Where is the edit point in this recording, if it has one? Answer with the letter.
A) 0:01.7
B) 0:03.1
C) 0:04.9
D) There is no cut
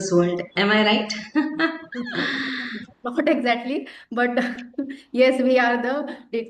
D